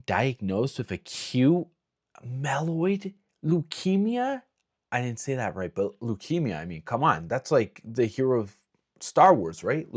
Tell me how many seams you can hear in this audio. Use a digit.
0